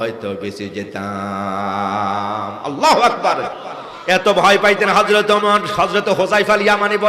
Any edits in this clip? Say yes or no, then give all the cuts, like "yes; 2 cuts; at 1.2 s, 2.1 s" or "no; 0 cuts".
no; 0 cuts